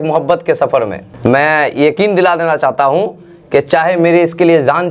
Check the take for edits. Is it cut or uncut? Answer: uncut